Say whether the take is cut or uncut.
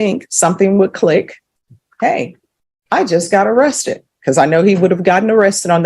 uncut